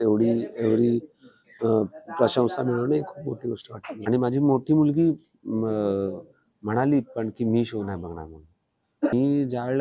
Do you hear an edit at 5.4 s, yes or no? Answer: no